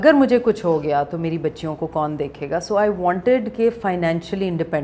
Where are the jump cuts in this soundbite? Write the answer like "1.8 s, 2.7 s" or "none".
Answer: none